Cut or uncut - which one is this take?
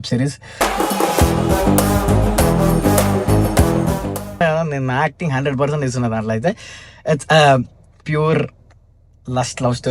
cut